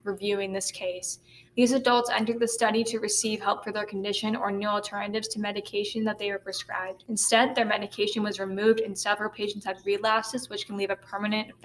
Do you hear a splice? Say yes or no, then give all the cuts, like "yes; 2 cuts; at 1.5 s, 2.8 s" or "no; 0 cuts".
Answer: yes; 1 cut; at 7.0 s